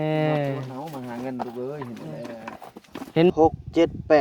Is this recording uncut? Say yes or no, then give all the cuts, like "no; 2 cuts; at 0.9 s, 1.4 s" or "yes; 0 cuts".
no; 1 cut; at 3.3 s